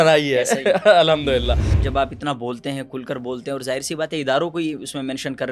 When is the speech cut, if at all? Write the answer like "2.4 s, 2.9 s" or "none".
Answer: 1.8 s